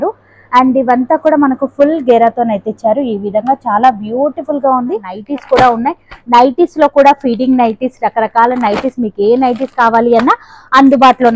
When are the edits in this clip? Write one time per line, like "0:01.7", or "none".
0:05.1